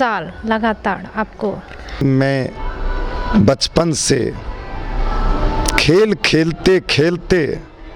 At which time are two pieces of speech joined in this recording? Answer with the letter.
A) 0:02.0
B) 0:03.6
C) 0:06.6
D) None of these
A